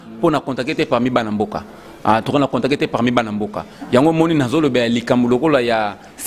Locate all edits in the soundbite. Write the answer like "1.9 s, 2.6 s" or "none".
none

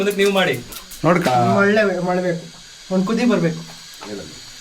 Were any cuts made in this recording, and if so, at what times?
1.3 s

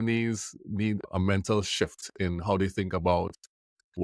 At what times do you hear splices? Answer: 1.1 s

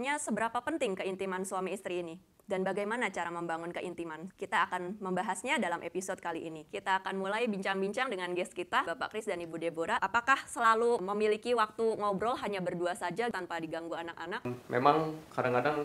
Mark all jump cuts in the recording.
none

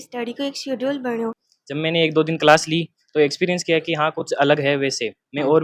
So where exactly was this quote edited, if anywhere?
1.5 s

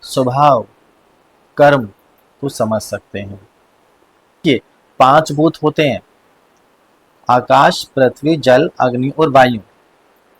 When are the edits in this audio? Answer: 4.4 s

